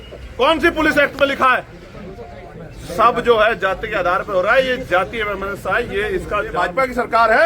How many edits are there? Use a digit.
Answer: 1